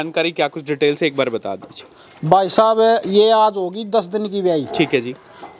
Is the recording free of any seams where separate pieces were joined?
yes; 0 cuts

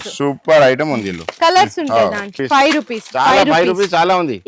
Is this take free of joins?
no; 1 cut; at 2.4 s

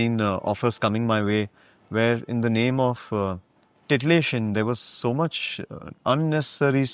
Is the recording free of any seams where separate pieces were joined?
yes; 0 cuts

